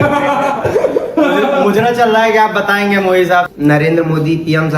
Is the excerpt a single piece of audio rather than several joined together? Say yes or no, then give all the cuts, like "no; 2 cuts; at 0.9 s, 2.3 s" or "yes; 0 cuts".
no; 1 cut; at 3.5 s